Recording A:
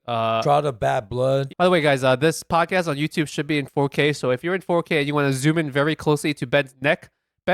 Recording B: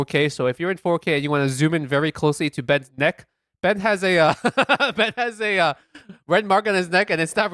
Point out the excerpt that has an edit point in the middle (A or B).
A